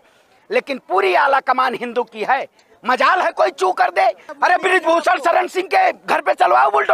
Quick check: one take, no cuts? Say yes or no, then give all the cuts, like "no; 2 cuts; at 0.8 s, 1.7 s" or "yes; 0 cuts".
no; 1 cut; at 4.3 s